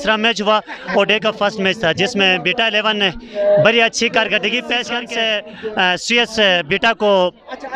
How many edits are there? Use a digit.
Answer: 1